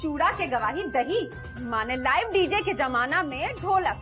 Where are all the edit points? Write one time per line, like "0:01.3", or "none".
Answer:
none